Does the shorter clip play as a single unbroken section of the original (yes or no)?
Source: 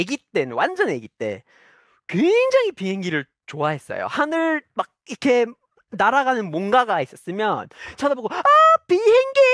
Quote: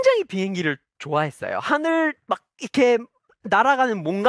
yes